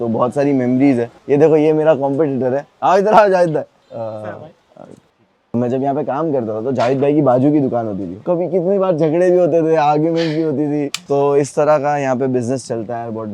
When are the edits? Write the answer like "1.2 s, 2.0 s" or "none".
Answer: 1.2 s, 3.8 s, 5.5 s, 8.2 s, 11.0 s